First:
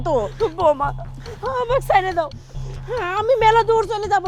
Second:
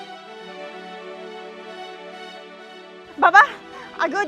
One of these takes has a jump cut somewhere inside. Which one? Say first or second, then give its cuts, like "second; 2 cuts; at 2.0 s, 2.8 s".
second; 1 cut; at 3.1 s